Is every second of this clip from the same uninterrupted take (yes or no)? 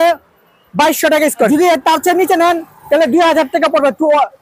no